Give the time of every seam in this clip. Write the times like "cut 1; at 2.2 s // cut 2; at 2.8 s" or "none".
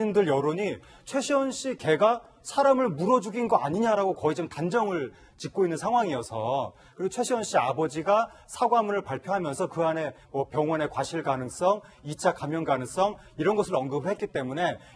cut 1; at 12.4 s